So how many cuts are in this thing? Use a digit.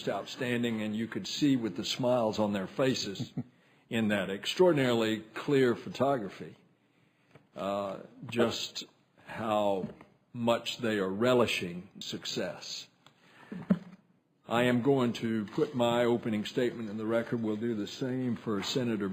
0